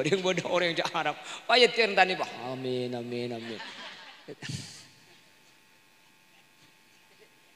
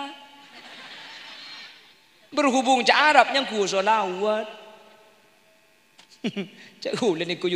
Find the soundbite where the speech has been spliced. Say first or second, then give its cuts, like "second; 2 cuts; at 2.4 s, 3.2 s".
first; 1 cut; at 3.8 s